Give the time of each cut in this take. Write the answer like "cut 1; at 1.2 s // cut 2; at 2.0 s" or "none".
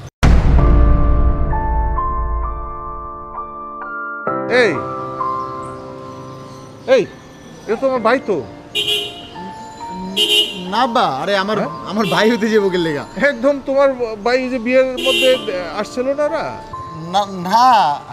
none